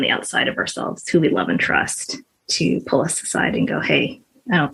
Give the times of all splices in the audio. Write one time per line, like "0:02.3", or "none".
none